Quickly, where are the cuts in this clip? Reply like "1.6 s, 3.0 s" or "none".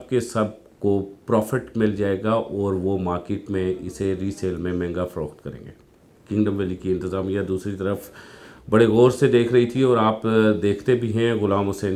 none